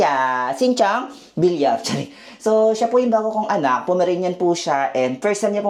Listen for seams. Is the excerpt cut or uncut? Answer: uncut